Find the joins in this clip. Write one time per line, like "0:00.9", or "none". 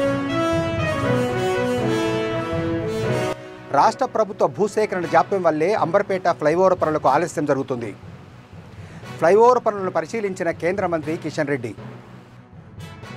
0:03.3